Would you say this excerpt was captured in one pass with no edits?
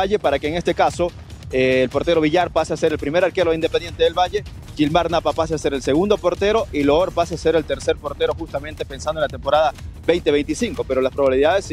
yes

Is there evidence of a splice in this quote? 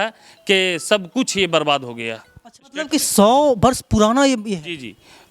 yes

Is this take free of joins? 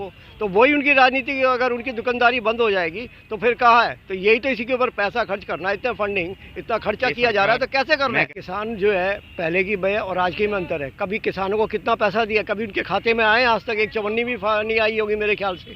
no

